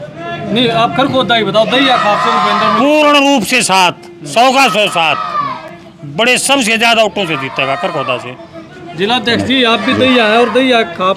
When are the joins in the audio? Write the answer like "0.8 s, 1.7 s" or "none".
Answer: none